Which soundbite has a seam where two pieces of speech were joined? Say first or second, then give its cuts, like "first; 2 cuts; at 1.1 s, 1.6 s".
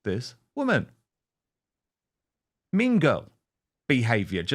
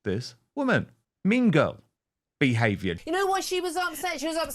second; 2 cuts; at 1.0 s, 3.0 s